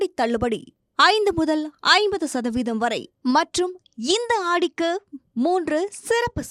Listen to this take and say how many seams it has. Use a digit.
0